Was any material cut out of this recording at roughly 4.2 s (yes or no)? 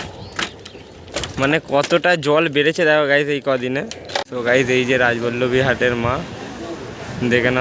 yes